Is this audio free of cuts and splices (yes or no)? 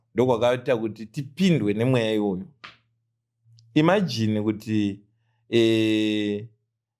yes